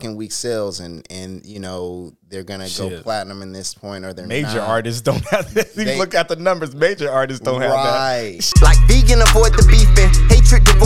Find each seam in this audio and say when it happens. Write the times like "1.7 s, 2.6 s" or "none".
8.4 s

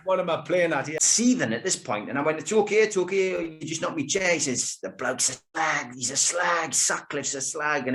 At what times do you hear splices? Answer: 1.0 s

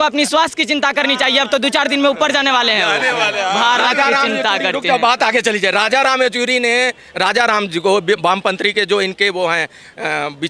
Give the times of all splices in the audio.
none

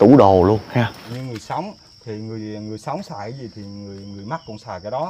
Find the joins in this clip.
1.0 s

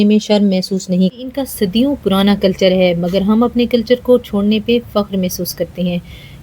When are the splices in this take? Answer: 1.2 s

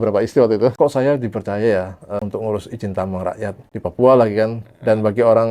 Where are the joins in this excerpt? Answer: 0.7 s, 2.2 s, 3.6 s

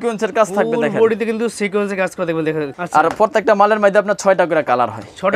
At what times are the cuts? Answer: 2.7 s

